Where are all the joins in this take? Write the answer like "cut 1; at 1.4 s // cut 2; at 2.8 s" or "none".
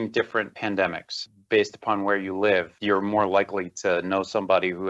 cut 1; at 1.3 s